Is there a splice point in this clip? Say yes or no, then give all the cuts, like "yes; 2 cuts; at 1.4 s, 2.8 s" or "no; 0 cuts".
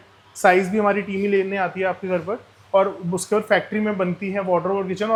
no; 0 cuts